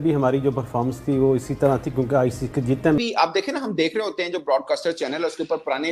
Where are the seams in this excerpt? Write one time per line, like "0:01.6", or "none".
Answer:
0:03.0